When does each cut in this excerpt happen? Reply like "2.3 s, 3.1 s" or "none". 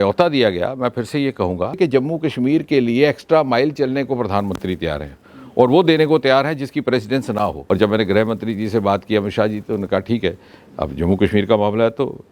1.8 s, 7.6 s